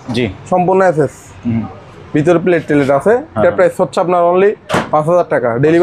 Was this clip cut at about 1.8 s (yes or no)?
no